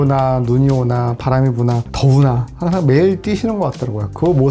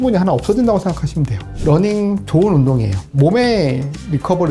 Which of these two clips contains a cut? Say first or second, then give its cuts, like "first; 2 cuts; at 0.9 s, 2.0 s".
second; 2 cuts; at 1.5 s, 3.1 s